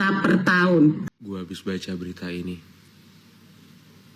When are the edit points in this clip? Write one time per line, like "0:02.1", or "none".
0:01.0